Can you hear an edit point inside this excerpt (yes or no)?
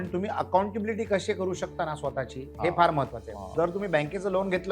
no